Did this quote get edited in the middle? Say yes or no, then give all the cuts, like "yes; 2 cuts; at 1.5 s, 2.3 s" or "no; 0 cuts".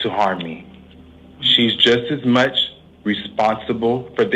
no; 0 cuts